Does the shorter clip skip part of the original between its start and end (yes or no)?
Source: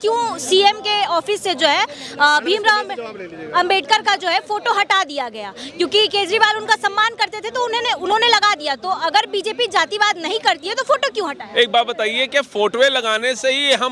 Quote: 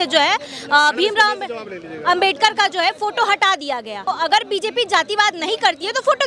yes